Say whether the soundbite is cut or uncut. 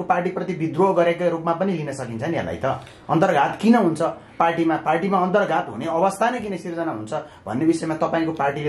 uncut